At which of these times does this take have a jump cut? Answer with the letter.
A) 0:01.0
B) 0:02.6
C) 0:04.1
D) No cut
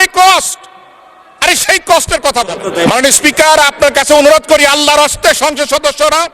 B